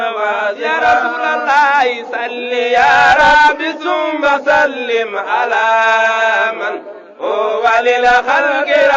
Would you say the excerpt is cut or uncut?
cut